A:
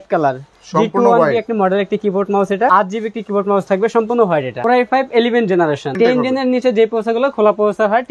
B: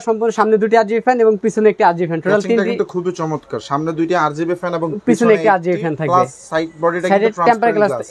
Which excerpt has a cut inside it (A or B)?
A